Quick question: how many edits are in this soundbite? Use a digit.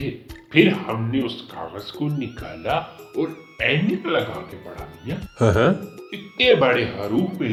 0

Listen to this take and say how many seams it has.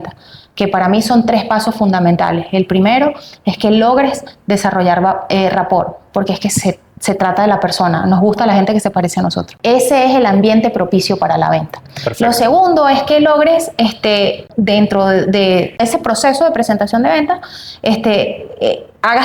3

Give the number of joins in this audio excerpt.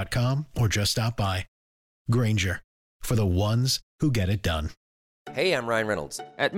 1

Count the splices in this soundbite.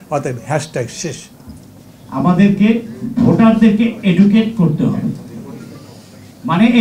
1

